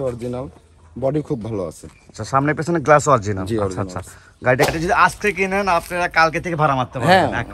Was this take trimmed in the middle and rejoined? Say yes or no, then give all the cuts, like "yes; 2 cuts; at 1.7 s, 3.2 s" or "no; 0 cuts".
yes; 1 cut; at 4.7 s